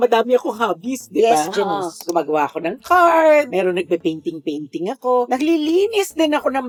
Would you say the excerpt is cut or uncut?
uncut